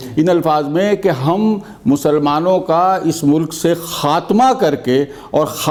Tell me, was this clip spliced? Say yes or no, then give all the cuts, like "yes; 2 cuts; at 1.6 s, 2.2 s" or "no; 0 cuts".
no; 0 cuts